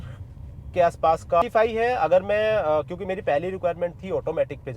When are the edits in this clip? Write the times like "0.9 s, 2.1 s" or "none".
1.4 s